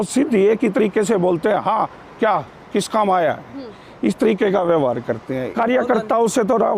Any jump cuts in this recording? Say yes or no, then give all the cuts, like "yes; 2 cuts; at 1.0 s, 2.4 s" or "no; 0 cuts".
yes; 1 cut; at 5.5 s